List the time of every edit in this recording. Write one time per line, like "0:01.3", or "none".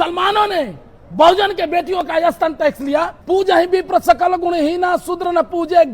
0:03.2